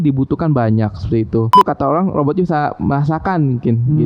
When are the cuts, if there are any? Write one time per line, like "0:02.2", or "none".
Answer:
0:01.5